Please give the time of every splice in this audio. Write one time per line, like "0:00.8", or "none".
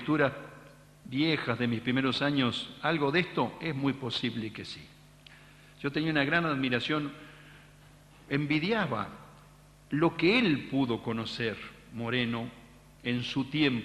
0:03.9